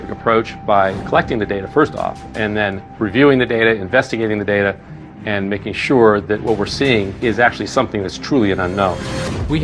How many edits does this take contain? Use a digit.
0